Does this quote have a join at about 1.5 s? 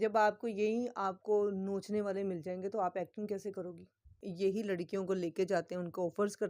no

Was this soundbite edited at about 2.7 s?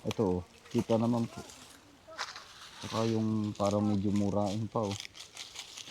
no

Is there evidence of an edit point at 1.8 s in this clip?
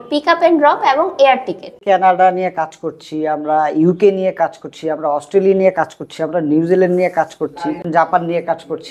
yes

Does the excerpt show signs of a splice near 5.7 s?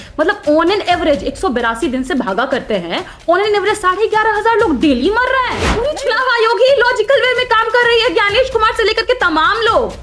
yes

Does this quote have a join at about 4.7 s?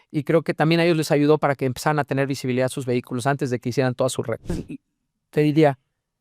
yes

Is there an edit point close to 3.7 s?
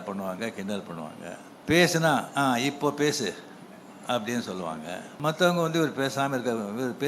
no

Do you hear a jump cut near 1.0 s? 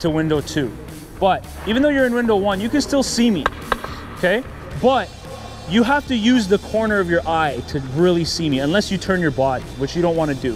no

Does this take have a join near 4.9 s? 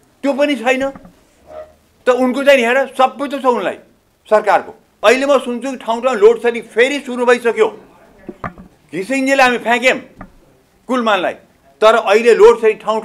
yes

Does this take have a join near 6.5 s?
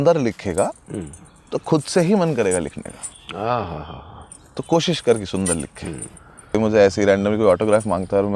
yes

